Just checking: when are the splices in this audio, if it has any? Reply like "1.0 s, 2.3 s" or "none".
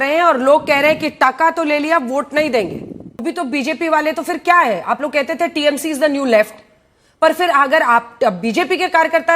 3.2 s